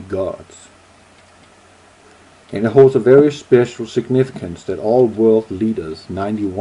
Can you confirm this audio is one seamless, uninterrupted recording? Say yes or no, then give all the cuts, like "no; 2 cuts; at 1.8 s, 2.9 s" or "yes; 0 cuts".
yes; 0 cuts